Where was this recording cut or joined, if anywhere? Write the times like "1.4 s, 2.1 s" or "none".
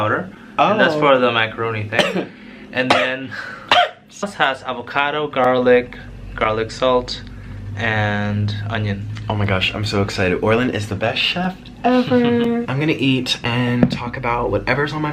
4.2 s